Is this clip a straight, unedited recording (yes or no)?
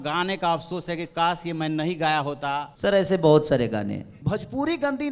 no